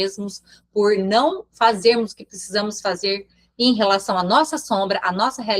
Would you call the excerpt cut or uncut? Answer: uncut